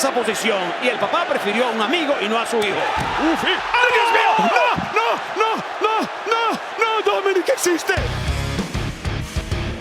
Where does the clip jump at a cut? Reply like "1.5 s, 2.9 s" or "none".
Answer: 8.1 s